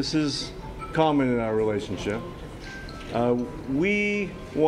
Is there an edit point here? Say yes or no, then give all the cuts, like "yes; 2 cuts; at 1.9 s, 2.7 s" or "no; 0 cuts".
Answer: no; 0 cuts